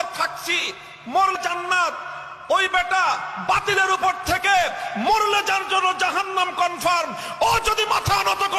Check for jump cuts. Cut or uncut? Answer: cut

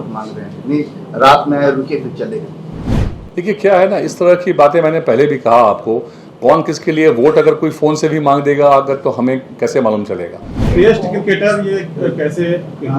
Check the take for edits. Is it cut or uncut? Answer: cut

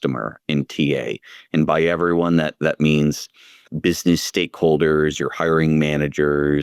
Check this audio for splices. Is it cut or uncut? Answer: uncut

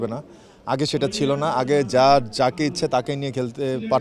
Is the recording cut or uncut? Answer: uncut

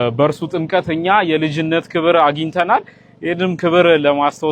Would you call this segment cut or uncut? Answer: uncut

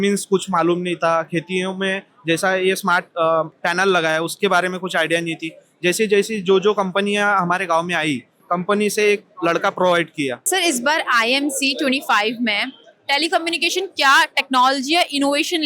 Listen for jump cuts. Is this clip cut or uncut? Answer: cut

